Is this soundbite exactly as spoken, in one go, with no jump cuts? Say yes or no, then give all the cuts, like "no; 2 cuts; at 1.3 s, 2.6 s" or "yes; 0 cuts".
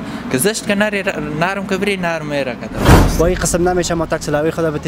no; 1 cut; at 2.9 s